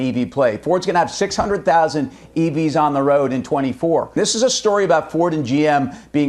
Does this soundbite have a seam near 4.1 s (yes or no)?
yes